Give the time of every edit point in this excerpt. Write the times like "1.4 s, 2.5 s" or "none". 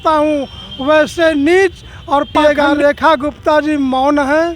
2.4 s